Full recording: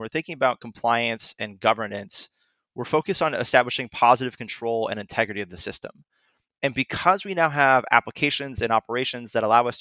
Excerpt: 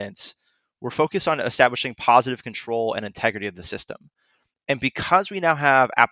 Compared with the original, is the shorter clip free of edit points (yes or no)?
yes